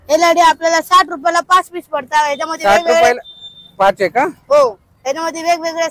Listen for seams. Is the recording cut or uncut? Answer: uncut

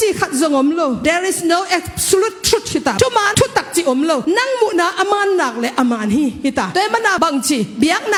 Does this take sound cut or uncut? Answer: uncut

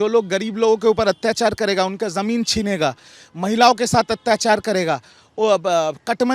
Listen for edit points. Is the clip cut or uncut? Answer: uncut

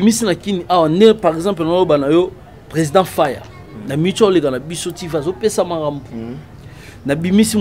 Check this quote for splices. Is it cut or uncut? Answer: uncut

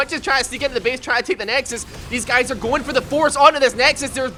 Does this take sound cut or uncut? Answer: uncut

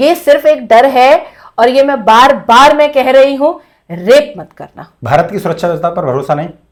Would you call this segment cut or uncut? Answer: uncut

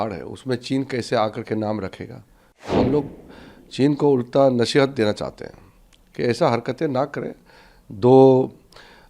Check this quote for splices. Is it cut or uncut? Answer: cut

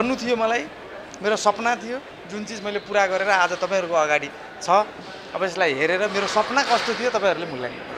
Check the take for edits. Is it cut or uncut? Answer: uncut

